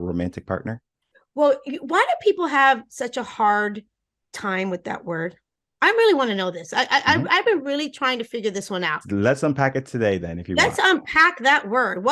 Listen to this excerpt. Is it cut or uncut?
cut